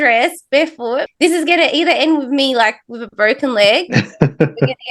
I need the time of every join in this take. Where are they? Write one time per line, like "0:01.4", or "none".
0:01.1